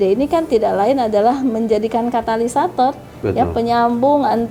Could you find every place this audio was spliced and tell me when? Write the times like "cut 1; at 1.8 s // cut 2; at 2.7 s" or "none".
none